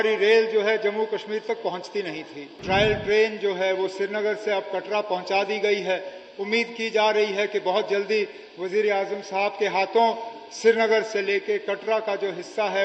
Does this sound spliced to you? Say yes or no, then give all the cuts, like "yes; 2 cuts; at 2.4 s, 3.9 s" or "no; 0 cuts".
yes; 1 cut; at 2.5 s